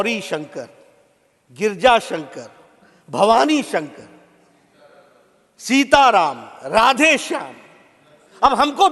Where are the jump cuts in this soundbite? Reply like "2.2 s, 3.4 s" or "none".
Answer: none